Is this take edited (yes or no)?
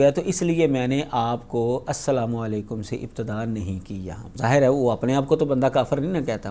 yes